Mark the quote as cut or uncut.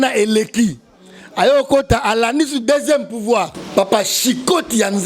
cut